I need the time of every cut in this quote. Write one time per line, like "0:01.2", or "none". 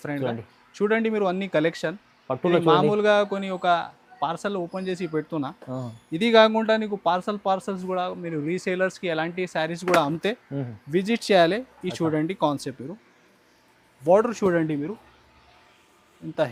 none

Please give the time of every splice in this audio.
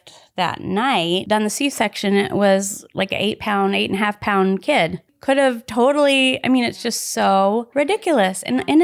0:01.2
0:05.1
0:07.7

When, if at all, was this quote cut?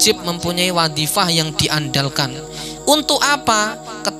none

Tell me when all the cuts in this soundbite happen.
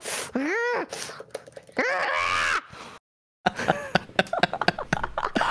none

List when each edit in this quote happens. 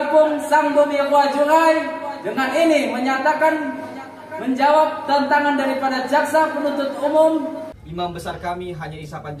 0:07.6

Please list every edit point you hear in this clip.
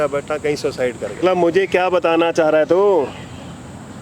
0:01.2

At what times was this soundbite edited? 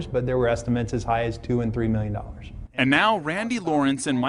none

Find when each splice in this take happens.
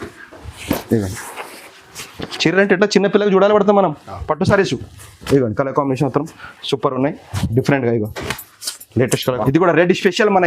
0:09.4

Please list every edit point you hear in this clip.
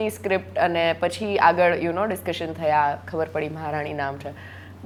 none

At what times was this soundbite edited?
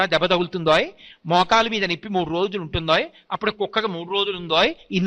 none

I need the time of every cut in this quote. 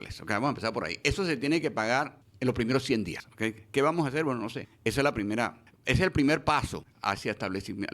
0:02.2
0:03.2
0:04.6
0:05.7
0:06.9

